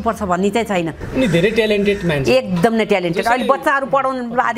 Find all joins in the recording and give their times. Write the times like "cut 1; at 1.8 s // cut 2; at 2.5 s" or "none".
cut 1; at 1.0 s